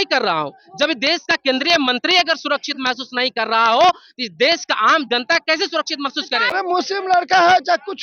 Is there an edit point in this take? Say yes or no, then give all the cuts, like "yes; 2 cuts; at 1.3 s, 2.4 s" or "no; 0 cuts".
yes; 1 cut; at 6.5 s